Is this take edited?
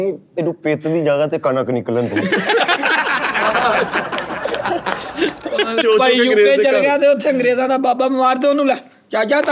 yes; 1 cut; at 5.8 s

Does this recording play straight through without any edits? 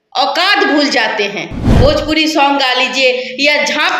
no; 1 cut; at 1.8 s

